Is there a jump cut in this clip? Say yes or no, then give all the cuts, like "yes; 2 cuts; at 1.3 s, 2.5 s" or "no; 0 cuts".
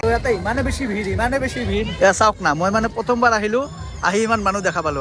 no; 0 cuts